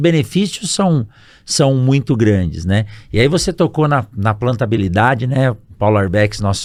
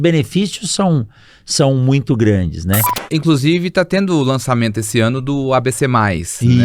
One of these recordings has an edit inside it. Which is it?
second; 1 cut; at 3.0 s

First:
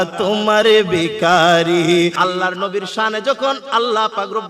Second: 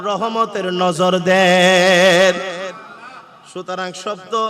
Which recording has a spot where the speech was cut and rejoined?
first; 1 cut; at 2.2 s

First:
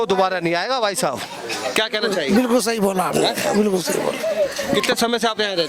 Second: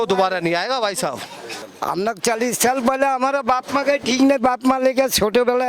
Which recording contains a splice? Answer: second; 1 cut; at 1.5 s

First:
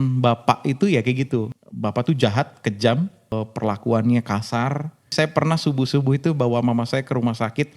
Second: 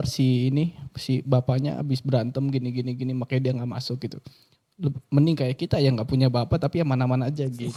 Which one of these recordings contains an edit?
first; 3 cuts; at 1.5 s, 3.3 s, 5.1 s

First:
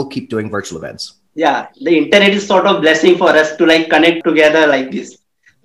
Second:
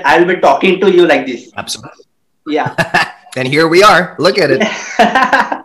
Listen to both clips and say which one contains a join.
first; 1 cut; at 4.2 s

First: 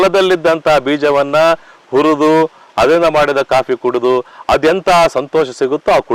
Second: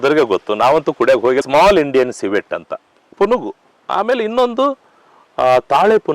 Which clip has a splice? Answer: second; 1 cut; at 1.4 s

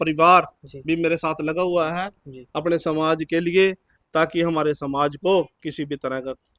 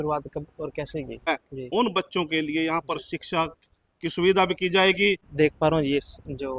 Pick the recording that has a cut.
second; 2 cuts; at 1.3 s, 5.3 s

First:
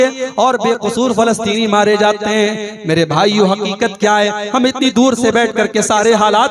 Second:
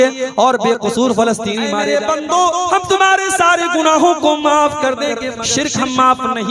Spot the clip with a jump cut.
second; 2 cuts; at 1.8 s, 5.3 s

